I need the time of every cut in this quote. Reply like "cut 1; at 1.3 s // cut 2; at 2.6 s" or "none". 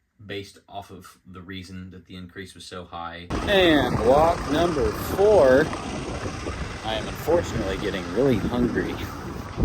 cut 1; at 3.4 s